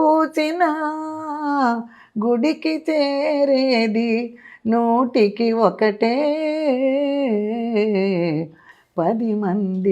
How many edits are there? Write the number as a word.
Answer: zero